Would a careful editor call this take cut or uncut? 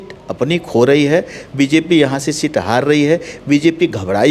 uncut